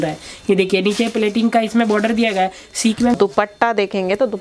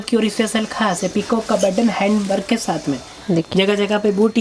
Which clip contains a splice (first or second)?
first